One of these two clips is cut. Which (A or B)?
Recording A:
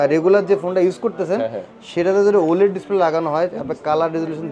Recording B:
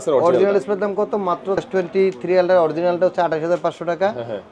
B